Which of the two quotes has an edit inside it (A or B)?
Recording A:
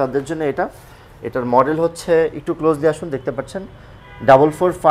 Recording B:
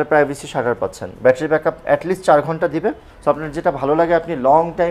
B